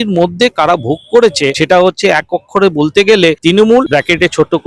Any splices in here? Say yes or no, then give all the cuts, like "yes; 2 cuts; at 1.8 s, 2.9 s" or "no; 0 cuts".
yes; 2 cuts; at 1.6 s, 3.6 s